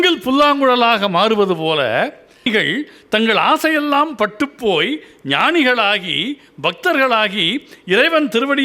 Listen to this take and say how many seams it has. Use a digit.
1